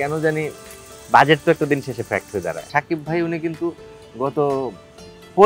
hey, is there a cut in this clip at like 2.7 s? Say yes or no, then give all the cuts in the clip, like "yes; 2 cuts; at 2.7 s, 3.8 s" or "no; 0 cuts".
yes; 1 cut; at 2.7 s